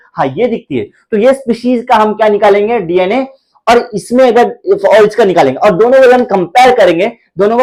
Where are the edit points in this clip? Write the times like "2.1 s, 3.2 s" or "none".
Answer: none